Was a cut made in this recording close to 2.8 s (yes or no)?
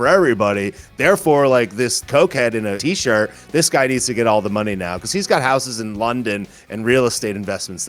yes